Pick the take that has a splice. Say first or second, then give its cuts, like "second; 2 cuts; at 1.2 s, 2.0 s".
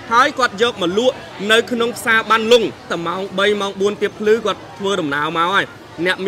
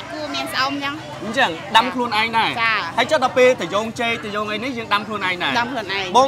first; 1 cut; at 2.9 s